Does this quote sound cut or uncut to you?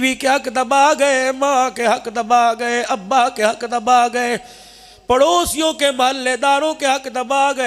uncut